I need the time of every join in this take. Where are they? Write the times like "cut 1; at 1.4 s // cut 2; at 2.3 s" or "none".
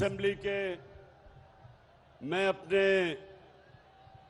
none